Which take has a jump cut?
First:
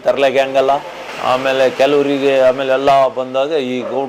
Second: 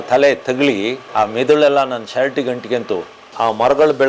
second; 2 cuts; at 1.0 s, 3.2 s

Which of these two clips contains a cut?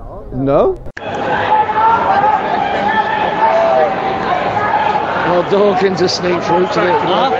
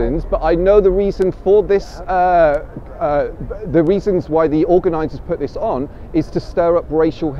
first; 1 cut; at 0.9 s

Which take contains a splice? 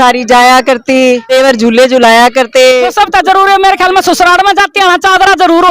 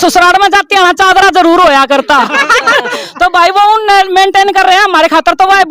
first; 2 cuts; at 1.3 s, 2.9 s

